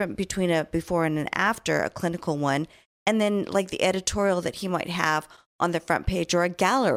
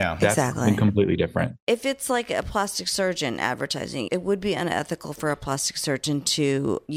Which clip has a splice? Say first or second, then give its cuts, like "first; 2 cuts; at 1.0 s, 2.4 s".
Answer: second; 2 cuts; at 1.6 s, 4.1 s